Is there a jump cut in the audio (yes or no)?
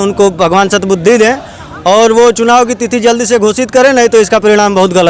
no